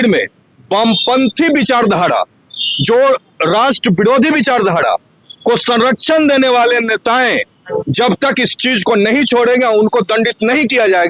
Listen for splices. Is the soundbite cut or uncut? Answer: uncut